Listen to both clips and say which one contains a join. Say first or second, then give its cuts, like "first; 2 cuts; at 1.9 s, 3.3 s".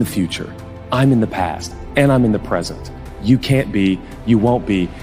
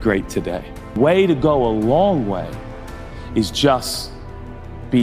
second; 1 cut; at 1.0 s